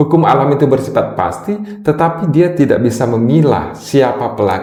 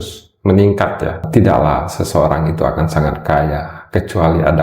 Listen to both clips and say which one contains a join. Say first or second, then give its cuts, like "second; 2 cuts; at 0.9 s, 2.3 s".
second; 1 cut; at 1.3 s